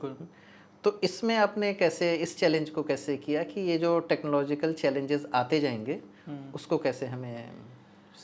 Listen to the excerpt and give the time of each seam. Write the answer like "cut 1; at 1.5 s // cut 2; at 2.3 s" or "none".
none